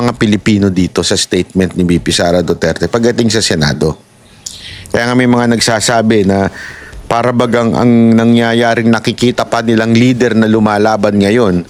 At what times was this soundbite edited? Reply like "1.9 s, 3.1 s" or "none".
none